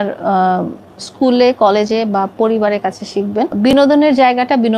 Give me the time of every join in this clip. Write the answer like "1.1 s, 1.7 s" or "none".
3.5 s